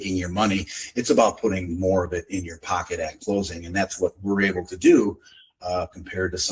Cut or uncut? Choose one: uncut